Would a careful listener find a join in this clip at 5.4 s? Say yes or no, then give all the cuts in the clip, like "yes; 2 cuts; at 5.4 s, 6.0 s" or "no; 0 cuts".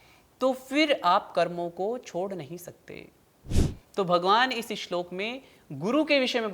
no; 1 cut; at 3.7 s